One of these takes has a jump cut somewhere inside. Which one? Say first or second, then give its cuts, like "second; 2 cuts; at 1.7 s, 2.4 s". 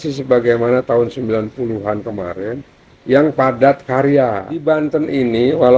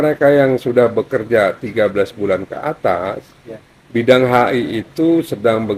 first; 1 cut; at 4.5 s